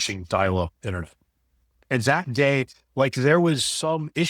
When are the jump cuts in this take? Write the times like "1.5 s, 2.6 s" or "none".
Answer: 1.8 s